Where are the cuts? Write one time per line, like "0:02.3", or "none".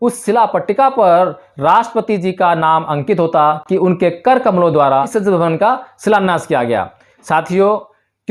none